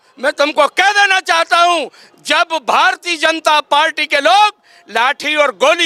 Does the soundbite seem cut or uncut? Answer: uncut